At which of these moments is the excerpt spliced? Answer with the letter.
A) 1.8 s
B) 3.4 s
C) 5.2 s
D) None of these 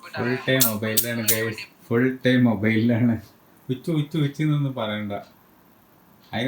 D